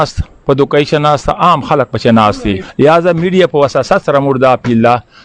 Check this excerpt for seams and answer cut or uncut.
cut